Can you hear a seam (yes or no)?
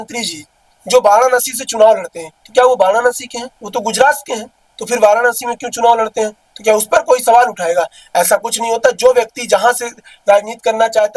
no